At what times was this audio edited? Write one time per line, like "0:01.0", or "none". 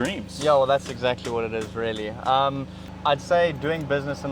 0:02.9